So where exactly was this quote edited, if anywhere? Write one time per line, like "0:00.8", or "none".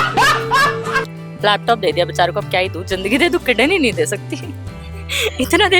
0:01.1